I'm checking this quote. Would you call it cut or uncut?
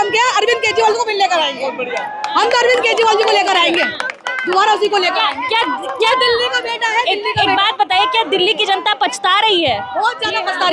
uncut